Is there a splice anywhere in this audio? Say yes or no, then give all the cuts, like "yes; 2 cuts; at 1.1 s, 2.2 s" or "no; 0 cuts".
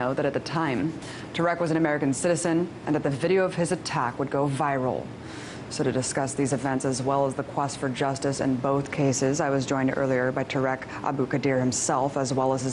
yes; 1 cut; at 5.4 s